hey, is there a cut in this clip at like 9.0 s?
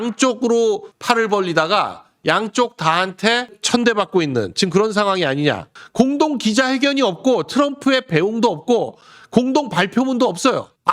no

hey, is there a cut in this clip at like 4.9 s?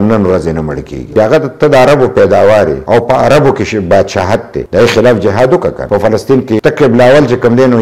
no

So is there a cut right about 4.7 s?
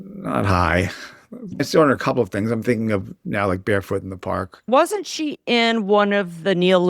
yes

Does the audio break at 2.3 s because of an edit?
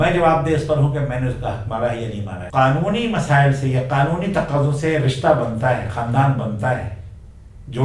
yes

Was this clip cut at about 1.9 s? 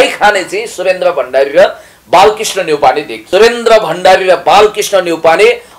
no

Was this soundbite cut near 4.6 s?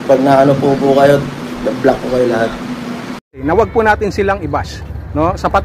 no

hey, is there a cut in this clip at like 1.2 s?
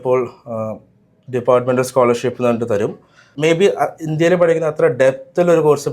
no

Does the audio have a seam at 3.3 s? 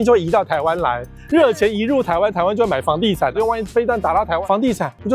yes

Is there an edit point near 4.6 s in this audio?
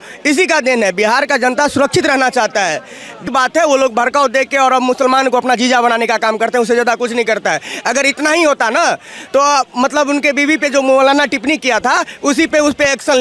no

